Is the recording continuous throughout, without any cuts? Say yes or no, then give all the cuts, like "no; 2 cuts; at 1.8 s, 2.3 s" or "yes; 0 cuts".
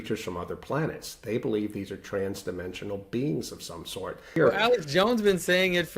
no; 1 cut; at 4.4 s